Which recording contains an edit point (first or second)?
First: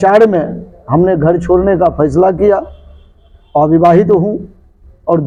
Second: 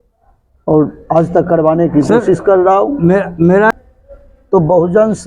second